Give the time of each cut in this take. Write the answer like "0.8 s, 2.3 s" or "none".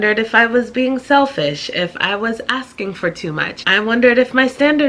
3.5 s